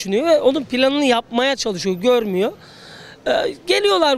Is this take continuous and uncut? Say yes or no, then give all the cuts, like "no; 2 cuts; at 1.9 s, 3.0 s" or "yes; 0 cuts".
yes; 0 cuts